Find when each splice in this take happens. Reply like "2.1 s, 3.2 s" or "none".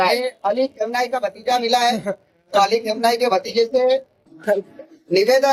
none